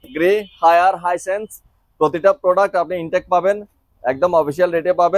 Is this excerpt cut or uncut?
uncut